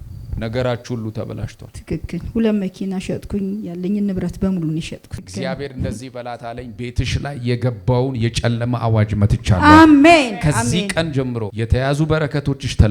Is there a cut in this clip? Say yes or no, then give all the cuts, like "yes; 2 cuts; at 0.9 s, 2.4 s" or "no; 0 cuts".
yes; 2 cuts; at 5.2 s, 11.5 s